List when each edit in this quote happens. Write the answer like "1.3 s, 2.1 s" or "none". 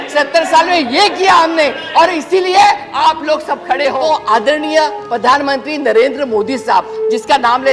4.0 s